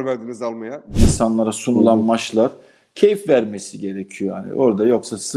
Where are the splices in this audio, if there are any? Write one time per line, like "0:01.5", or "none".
0:00.9

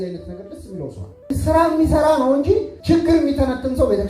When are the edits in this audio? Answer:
0:01.3
0:02.7

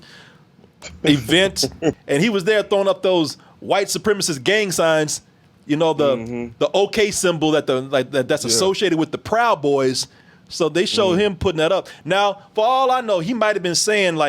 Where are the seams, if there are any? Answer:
0:02.0

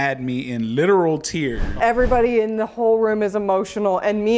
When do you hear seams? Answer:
0:01.8

